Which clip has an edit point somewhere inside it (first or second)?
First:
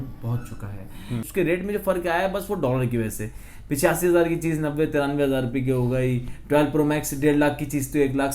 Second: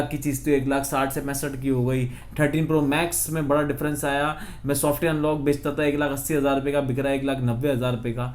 first